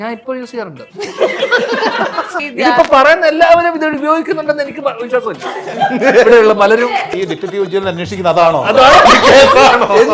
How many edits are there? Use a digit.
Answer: 2